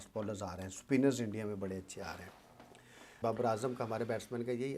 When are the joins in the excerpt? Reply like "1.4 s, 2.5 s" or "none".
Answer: 3.1 s